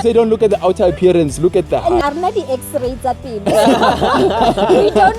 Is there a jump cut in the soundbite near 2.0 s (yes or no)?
yes